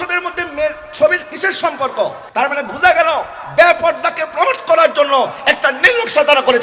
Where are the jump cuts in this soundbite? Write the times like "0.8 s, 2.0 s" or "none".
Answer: 2.2 s